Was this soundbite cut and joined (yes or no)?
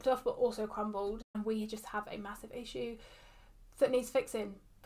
yes